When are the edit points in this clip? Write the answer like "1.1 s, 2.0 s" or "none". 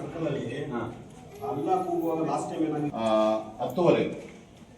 2.9 s